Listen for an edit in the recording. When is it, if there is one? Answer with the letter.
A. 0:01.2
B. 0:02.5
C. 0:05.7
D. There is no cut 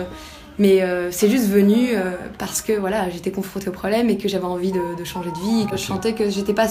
C